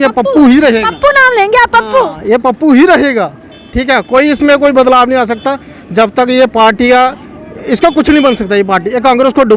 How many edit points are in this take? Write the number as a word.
zero